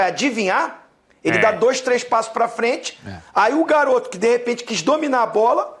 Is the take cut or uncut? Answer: uncut